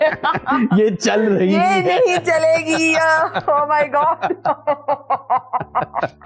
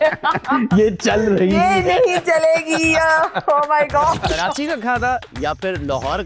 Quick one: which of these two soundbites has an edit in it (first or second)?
second